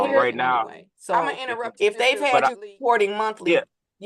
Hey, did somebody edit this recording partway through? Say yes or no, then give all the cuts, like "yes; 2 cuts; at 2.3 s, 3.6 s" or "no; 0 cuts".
yes; 1 cut; at 1.7 s